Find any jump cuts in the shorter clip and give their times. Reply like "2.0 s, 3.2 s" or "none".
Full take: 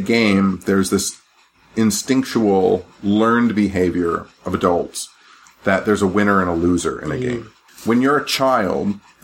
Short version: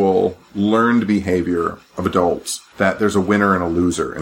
2.6 s

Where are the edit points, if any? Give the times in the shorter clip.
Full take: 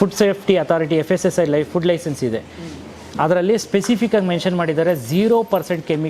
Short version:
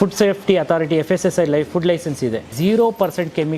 2.5 s

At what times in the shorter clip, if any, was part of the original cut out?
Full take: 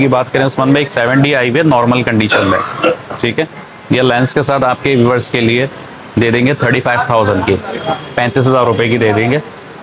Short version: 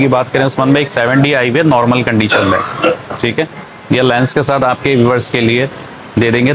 none

